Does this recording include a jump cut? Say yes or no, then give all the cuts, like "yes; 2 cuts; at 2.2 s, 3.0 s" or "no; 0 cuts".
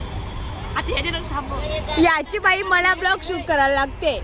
no; 0 cuts